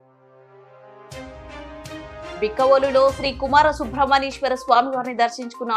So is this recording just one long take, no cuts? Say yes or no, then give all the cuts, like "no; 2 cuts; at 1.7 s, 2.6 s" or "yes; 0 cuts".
no; 1 cut; at 2.4 s